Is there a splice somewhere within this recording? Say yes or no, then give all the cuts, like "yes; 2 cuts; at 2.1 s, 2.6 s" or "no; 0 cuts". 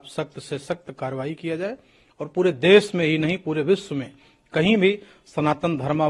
no; 0 cuts